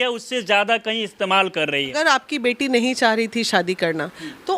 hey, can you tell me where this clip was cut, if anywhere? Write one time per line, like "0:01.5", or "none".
0:01.9